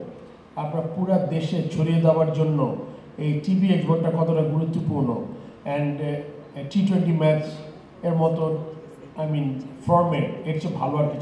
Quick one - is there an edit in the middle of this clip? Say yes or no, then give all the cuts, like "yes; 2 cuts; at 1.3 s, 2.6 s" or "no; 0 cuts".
no; 0 cuts